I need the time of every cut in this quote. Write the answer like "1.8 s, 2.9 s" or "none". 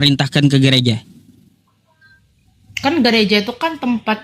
none